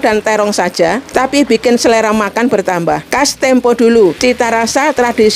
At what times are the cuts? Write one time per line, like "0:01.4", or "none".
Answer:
0:01.0
0:03.1
0:04.2